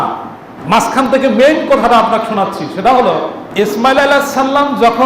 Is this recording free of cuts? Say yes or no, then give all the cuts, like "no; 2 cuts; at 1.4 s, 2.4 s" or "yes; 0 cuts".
no; 1 cut; at 3.4 s